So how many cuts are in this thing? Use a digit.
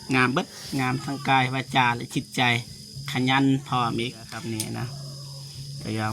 1